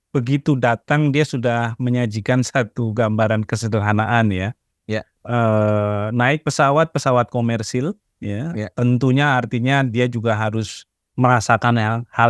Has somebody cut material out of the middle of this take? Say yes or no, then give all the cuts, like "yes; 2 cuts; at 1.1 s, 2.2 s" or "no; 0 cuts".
no; 0 cuts